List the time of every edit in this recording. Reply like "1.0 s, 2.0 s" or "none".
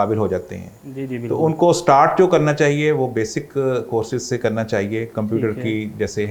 none